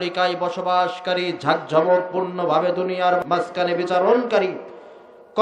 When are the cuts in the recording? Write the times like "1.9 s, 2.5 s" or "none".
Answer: 3.2 s